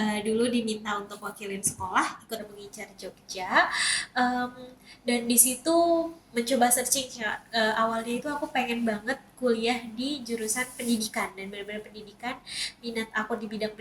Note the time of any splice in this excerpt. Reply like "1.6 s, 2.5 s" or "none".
2.5 s

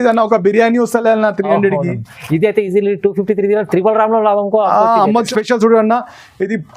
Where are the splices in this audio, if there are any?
5.3 s

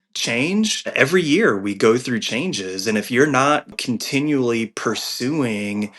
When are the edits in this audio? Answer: 0.9 s, 3.8 s

